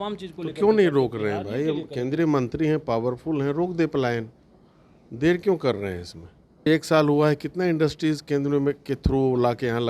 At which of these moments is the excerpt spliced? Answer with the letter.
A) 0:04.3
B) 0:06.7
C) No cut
B